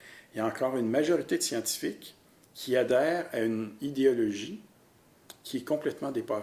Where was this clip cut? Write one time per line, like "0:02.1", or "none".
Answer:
none

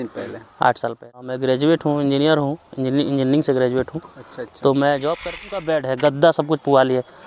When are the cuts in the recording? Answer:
0:01.3
0:05.6

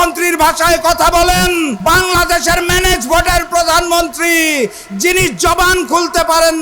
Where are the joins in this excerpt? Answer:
0:01.8

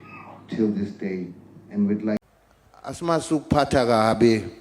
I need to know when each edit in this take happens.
0:02.2

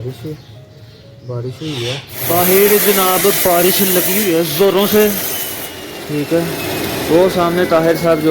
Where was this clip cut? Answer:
0:02.1

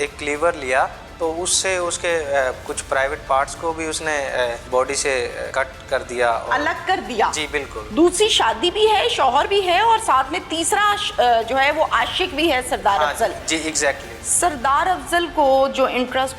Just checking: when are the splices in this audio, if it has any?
0:01.0
0:04.6
0:05.5
0:07.8

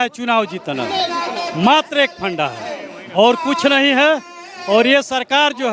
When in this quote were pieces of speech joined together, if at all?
none

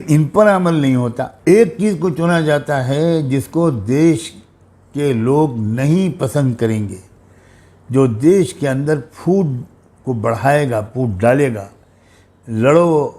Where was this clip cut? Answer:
0:01.3

